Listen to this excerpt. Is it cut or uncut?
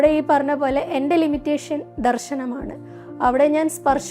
uncut